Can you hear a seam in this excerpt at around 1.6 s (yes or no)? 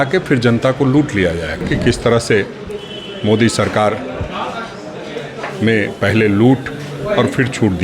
yes